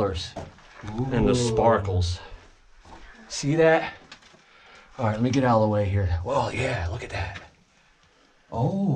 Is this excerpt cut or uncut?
uncut